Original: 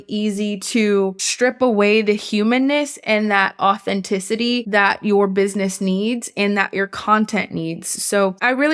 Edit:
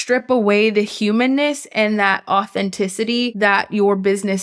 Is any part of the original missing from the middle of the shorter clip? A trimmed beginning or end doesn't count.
no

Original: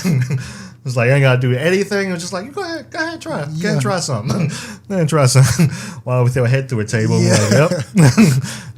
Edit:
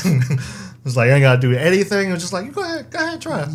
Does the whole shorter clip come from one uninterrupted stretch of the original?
yes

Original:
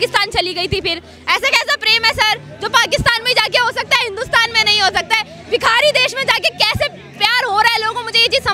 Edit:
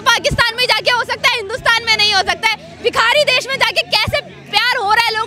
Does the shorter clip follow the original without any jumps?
yes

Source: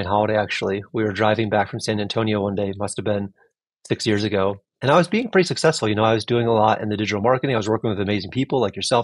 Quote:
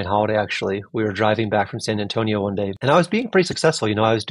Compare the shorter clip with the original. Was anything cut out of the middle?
yes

